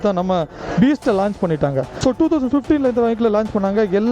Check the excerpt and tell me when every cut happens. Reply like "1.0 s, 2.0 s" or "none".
1.9 s